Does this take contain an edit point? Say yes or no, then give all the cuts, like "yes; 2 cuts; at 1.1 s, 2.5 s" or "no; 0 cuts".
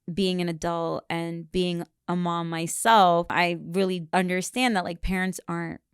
yes; 1 cut; at 3.5 s